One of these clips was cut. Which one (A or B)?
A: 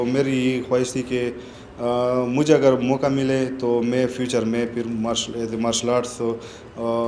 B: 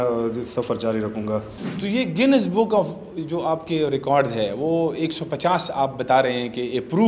B